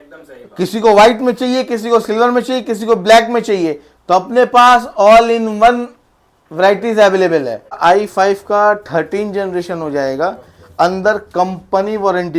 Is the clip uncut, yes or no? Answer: no